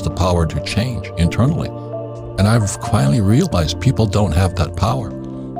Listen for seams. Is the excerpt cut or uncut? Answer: uncut